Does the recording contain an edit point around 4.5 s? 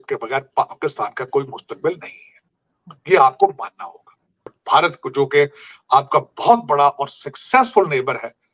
yes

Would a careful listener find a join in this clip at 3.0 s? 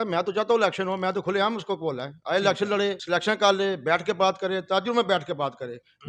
yes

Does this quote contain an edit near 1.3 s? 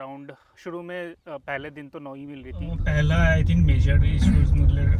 no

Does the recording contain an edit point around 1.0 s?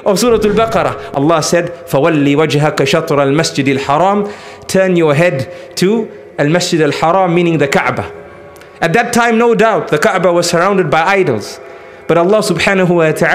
yes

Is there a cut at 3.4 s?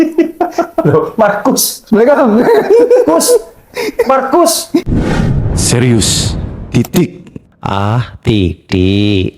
no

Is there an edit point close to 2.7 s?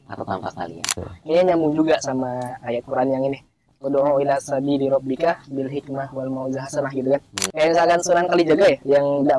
no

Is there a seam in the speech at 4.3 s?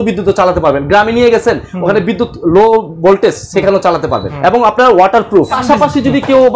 yes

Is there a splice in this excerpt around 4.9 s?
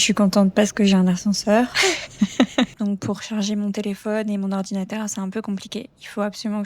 no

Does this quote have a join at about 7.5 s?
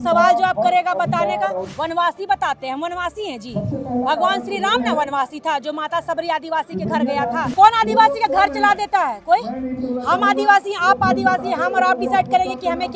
yes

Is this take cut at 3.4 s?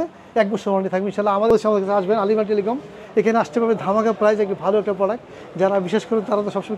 no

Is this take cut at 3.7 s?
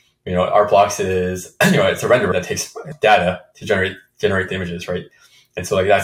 no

